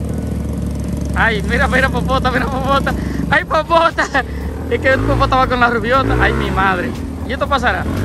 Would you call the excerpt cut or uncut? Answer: uncut